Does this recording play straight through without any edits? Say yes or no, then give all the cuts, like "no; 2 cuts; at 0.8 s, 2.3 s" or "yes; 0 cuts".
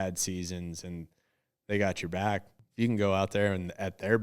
no; 1 cut; at 2.6 s